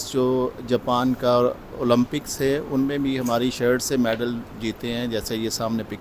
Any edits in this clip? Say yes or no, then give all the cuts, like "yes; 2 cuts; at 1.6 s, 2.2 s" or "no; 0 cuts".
no; 0 cuts